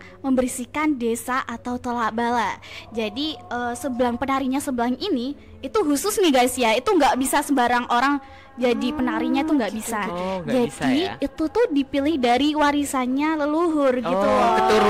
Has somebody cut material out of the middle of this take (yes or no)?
no